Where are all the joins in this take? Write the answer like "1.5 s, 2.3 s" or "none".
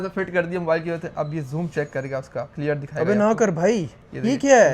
2.5 s